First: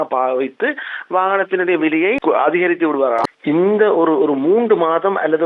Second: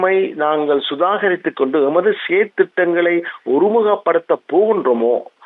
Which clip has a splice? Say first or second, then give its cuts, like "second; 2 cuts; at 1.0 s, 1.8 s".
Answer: first; 2 cuts; at 2.2 s, 3.3 s